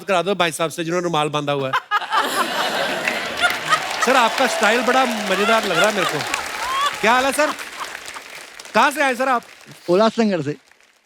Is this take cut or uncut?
uncut